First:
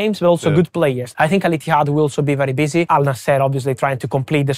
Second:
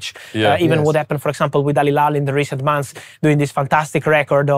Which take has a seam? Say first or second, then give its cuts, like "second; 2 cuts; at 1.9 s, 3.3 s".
first; 2 cuts; at 1.0 s, 2.9 s